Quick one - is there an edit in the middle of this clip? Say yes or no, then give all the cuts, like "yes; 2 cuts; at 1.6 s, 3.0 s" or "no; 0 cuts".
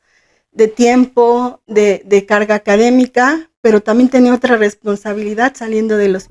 no; 0 cuts